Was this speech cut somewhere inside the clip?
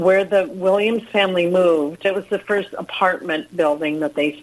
yes; 1 cut; at 2.0 s

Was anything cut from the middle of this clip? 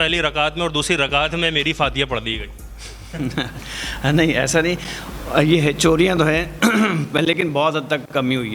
no; 0 cuts

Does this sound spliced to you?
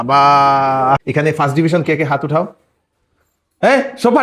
yes; 1 cut; at 1.0 s

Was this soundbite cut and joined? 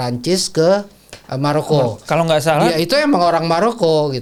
no; 0 cuts

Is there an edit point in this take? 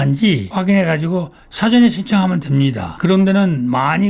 yes; 1 cut; at 3.0 s

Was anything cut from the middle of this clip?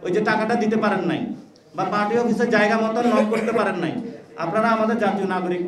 no; 0 cuts

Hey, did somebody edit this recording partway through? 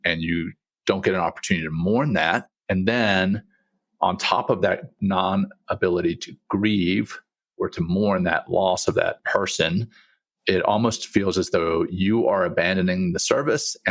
yes; 1 cut; at 9.2 s

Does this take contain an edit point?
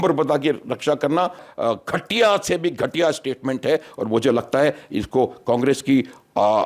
yes; 1 cut; at 1.5 s

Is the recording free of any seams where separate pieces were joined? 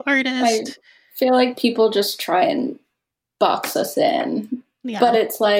yes; 0 cuts

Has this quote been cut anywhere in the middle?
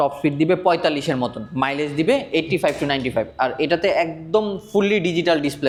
no; 0 cuts

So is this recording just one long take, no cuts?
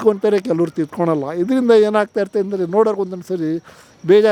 yes; 0 cuts

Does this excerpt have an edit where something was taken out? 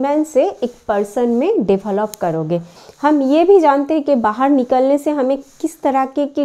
yes; 1 cut; at 2.7 s

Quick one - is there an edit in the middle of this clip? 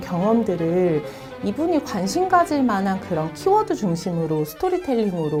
no; 0 cuts

